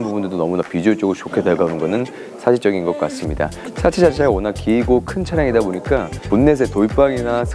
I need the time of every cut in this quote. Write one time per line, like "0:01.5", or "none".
none